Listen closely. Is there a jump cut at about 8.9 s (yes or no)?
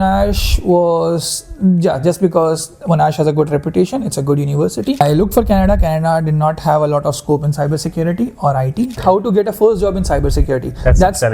yes